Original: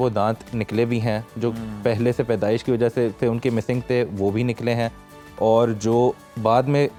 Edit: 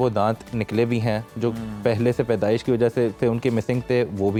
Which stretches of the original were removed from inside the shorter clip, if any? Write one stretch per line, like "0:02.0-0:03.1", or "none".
none